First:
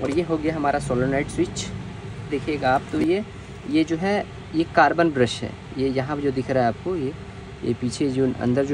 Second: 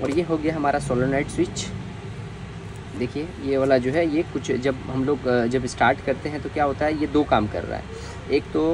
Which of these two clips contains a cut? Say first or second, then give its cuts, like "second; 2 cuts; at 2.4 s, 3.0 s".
first; 1 cut; at 2.3 s